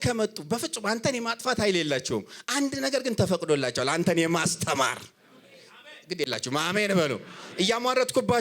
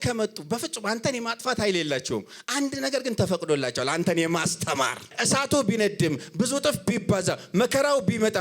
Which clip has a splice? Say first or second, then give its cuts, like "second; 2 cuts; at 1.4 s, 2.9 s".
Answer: second; 1 cut; at 5.1 s